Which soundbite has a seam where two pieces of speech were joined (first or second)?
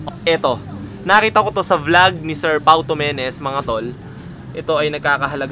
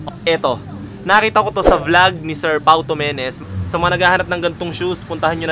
second